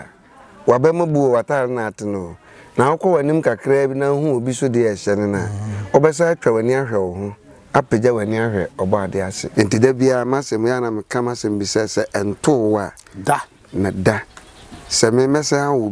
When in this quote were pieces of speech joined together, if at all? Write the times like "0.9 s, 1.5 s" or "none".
9.4 s